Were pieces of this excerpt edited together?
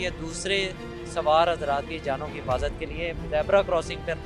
no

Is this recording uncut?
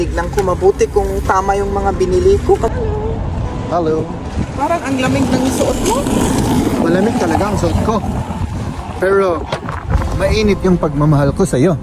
no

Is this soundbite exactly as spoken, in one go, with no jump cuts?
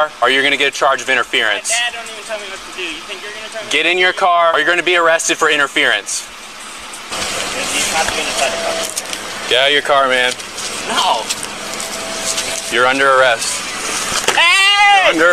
no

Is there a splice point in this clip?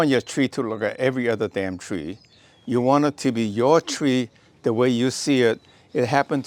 no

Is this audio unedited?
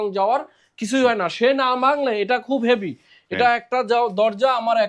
yes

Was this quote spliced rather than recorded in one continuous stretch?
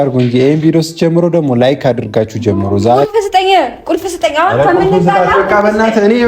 yes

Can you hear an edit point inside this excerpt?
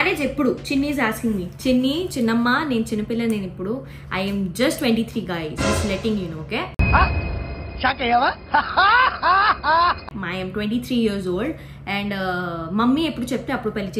no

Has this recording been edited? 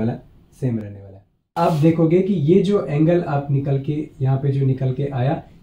yes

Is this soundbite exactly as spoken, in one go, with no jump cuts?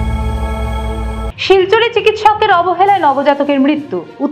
no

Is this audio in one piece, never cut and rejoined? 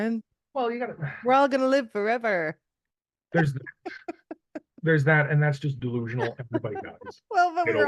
yes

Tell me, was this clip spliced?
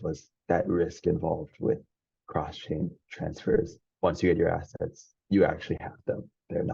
yes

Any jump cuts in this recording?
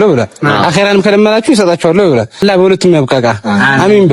yes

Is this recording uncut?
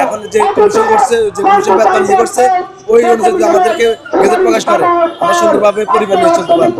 yes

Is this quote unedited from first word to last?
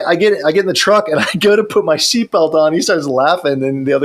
yes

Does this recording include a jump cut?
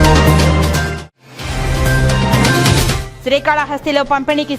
yes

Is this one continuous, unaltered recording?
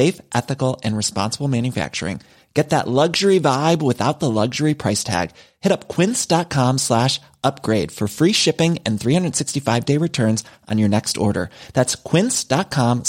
yes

